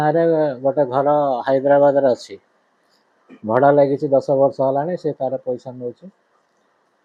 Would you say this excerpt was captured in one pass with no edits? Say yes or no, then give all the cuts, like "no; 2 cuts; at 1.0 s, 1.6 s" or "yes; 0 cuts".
yes; 0 cuts